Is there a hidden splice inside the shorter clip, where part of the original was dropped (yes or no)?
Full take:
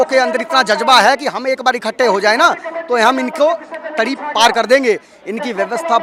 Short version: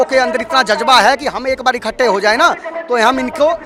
no